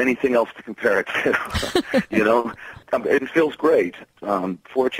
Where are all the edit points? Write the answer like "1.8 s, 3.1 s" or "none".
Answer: 2.7 s, 4.1 s